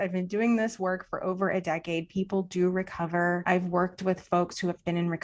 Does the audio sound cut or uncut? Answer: cut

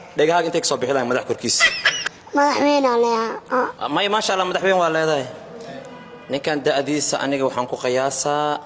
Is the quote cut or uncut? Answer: uncut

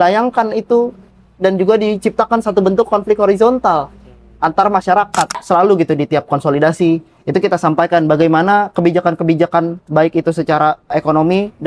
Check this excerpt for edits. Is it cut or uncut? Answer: cut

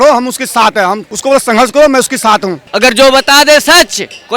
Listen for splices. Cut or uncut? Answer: cut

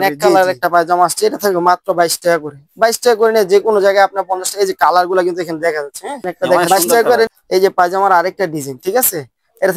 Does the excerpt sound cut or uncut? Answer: cut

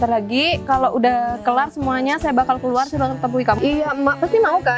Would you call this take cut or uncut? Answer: cut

